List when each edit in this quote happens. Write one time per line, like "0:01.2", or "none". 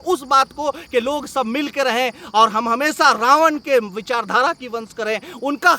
none